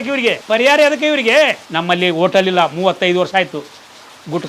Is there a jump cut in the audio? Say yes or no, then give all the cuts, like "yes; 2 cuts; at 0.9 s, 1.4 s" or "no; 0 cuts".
yes; 1 cut; at 1.7 s